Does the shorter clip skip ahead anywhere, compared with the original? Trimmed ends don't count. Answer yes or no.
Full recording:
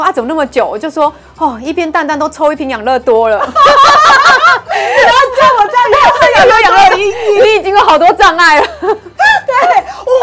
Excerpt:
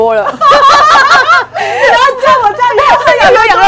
no